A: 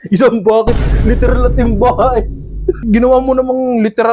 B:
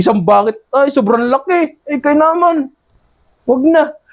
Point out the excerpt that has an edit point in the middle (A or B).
A